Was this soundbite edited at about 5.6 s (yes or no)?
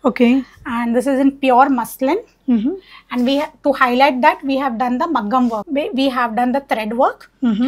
yes